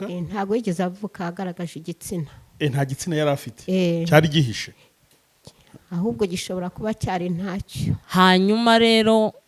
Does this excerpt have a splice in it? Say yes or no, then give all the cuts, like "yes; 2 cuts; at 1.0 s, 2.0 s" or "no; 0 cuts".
yes; 1 cut; at 8.0 s